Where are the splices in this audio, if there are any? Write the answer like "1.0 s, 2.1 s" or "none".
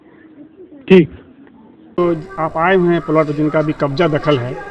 2.0 s